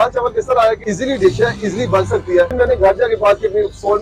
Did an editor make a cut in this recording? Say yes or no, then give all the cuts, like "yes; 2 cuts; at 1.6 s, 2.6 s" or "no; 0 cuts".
yes; 2 cuts; at 0.8 s, 2.5 s